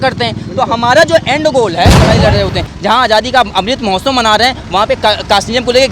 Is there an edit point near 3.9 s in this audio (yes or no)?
no